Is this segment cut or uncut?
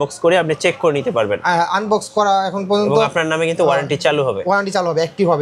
uncut